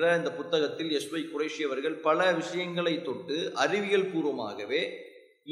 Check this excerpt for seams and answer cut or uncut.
uncut